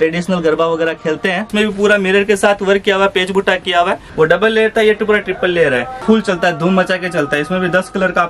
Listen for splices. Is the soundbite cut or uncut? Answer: cut